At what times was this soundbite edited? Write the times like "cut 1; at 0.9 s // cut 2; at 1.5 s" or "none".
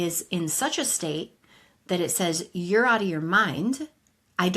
none